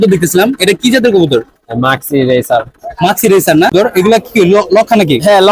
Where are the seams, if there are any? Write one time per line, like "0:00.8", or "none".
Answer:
0:03.7